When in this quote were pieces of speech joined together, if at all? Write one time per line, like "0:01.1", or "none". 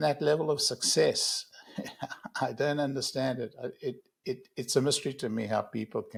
none